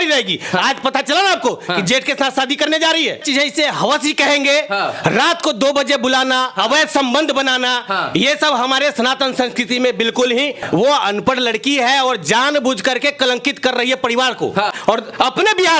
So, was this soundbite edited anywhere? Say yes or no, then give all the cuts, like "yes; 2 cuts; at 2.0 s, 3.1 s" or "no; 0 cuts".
yes; 3 cuts; at 3.2 s, 10.6 s, 14.8 s